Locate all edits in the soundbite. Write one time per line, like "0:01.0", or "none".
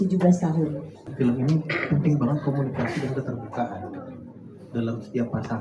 0:01.1

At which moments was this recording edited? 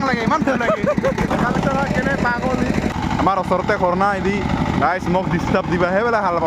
0:01.3
0:02.9

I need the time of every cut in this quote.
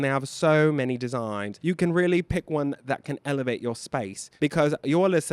0:01.5
0:02.8
0:04.2

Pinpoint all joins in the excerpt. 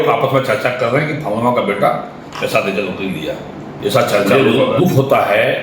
0:04.6

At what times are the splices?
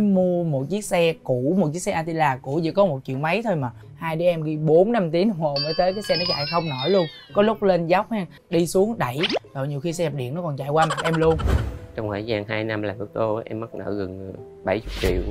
0:03.7
0:08.3
0:11.5

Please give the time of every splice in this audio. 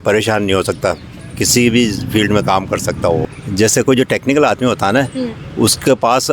0:03.2

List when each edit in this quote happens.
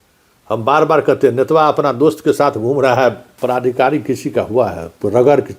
0:03.3

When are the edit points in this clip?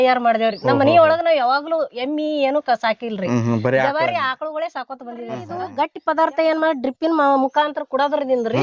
0:05.6

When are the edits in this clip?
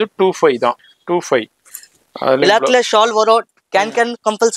0:00.9

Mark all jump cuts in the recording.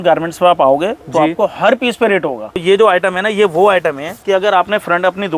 0:02.6
0:04.1

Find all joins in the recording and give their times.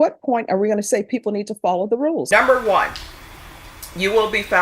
0:02.3

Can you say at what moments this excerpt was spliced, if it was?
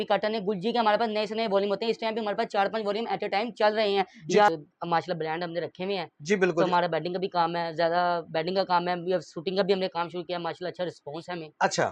0:04.5

